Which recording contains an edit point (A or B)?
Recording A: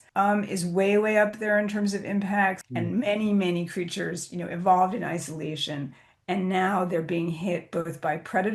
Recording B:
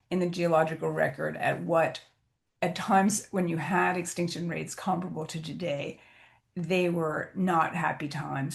A